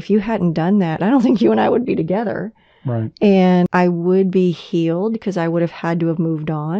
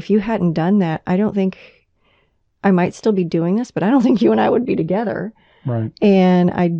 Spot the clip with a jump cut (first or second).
first